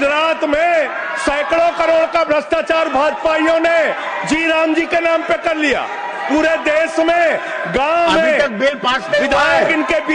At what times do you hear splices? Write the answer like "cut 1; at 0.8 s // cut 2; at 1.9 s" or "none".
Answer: none